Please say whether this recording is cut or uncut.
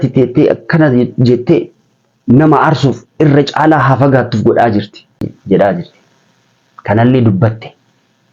cut